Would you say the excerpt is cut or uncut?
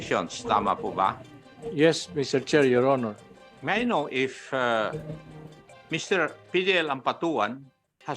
cut